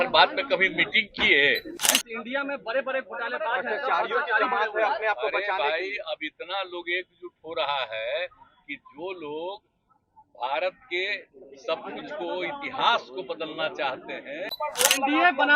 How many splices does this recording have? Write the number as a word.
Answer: two